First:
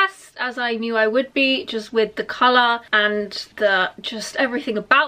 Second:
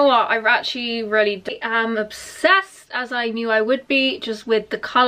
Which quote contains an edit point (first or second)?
second